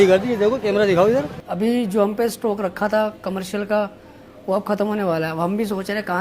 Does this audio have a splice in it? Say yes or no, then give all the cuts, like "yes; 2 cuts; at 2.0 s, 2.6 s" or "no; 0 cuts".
yes; 1 cut; at 1.4 s